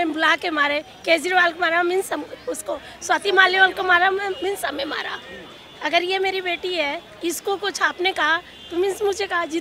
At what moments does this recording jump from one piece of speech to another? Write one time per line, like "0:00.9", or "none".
none